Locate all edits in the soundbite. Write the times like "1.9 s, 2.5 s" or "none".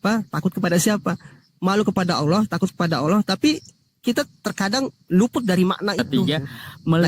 6.1 s